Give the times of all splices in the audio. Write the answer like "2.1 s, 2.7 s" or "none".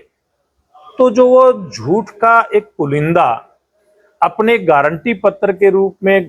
none